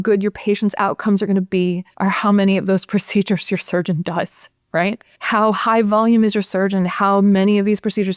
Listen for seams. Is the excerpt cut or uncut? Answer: cut